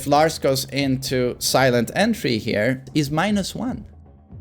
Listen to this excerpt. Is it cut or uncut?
cut